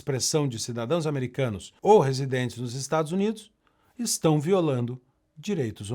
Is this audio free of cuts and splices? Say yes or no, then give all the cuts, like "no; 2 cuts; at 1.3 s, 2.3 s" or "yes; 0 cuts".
no; 1 cut; at 1.7 s